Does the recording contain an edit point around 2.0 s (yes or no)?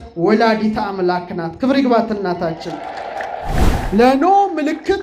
no